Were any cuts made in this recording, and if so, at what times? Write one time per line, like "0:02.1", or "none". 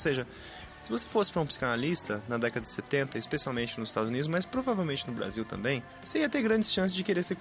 0:05.9

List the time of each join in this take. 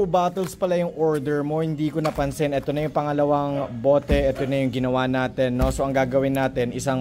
none

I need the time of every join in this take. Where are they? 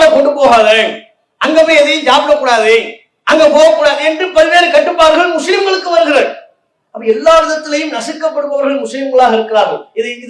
none

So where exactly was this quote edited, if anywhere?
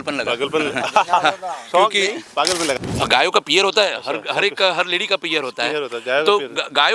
0:02.8

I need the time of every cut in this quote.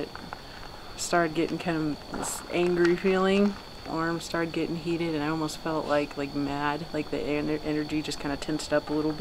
0:03.9

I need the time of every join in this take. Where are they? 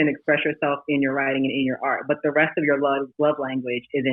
none

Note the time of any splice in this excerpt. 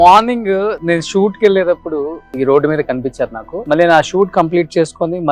0:02.2
0:03.5

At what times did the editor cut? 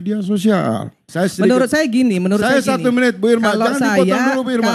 0:01.0

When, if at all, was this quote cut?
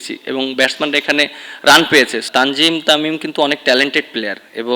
0:02.2

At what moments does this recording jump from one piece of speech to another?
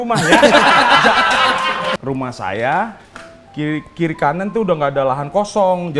0:01.8

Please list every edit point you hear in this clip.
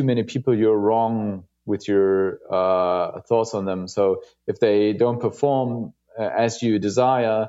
none

